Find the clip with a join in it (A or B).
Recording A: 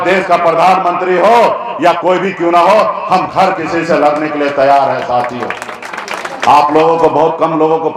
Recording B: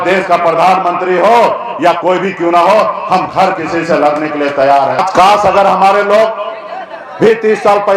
B